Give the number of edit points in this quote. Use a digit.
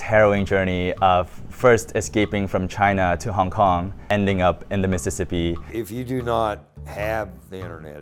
2